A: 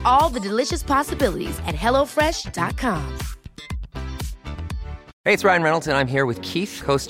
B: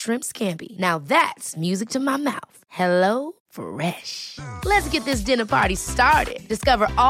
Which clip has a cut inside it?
A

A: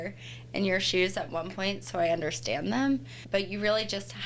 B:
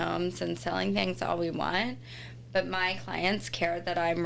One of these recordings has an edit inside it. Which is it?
A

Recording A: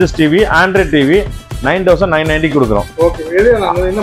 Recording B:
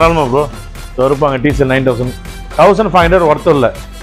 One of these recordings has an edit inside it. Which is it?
B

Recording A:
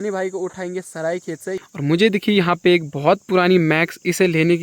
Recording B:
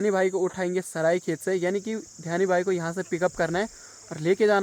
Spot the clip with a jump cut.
A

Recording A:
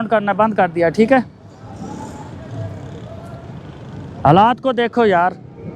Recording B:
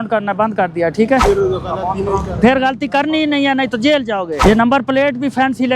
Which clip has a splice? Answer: B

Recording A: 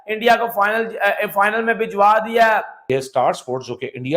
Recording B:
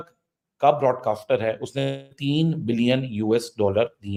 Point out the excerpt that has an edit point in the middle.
A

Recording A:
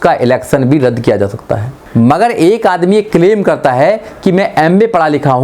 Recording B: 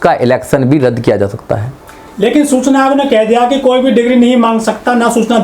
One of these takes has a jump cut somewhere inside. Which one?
A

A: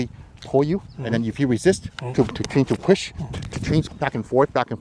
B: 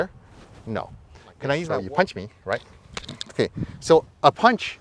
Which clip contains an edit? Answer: B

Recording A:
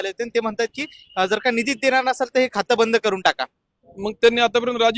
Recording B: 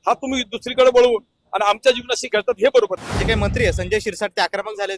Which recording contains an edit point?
B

